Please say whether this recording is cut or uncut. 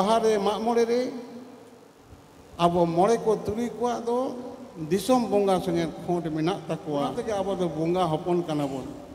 cut